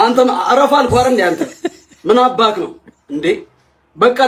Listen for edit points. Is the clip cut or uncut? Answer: uncut